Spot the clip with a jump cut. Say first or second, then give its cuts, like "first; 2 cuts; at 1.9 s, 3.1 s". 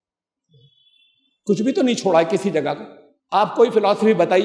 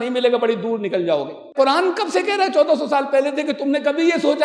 second; 1 cut; at 1.5 s